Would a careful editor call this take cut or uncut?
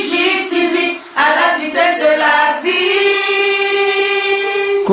uncut